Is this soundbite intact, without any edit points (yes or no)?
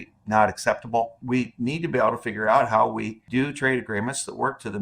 no